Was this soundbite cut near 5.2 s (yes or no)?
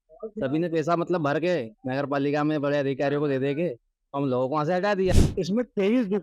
yes